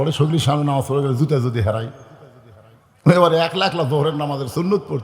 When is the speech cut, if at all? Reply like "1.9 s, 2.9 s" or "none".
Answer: none